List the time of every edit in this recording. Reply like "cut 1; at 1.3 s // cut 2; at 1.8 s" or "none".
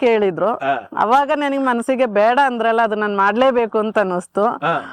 none